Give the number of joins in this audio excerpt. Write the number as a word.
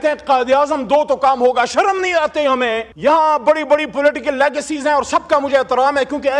one